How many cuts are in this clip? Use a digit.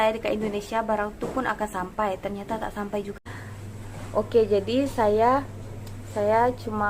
1